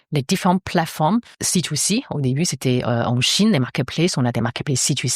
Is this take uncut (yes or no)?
no